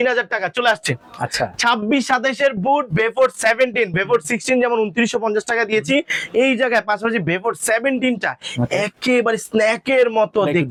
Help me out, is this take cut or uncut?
uncut